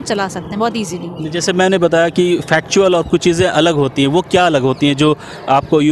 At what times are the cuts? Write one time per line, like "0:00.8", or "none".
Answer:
none